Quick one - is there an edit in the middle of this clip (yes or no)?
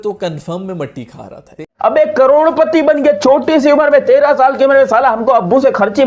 yes